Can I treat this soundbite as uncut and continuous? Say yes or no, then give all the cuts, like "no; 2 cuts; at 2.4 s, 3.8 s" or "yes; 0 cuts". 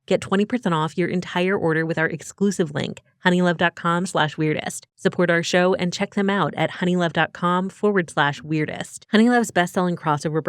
no; 1 cut; at 8.9 s